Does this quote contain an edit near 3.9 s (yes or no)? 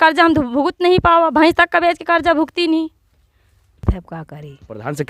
yes